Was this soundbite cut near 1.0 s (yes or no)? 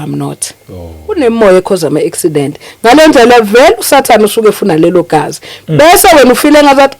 yes